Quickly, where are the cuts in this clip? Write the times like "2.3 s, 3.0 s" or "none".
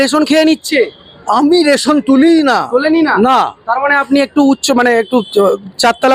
none